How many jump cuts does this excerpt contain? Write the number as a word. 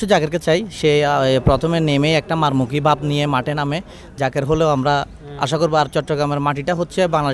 zero